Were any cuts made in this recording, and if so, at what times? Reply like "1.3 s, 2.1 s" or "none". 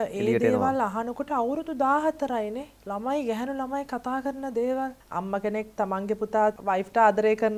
2.7 s, 5.6 s, 6.5 s